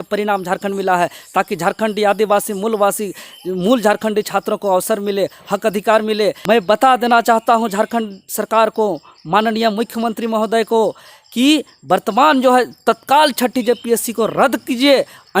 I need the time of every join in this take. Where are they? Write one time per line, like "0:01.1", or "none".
0:06.3